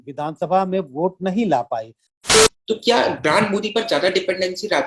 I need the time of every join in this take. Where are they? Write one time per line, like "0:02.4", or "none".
0:02.2